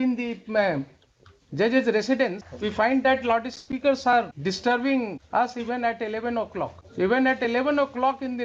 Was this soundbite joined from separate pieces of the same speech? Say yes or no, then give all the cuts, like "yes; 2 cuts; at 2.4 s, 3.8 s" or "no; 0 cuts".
yes; 4 cuts; at 2.5 s, 4.3 s, 5.2 s, 6.8 s